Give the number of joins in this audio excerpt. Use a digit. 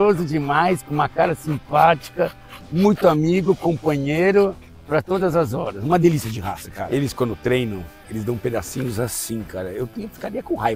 1